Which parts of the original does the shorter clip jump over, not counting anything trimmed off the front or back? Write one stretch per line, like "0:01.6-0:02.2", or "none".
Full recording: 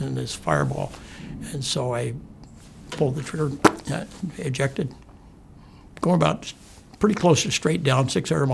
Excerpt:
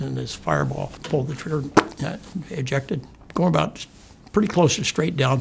0:01.0-0:02.8
0:05.0-0:05.8

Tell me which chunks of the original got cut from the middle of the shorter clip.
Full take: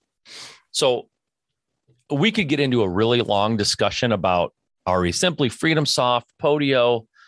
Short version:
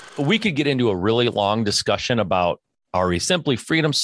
none

